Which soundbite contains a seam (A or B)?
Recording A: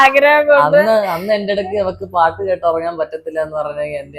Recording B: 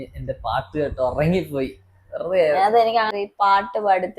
B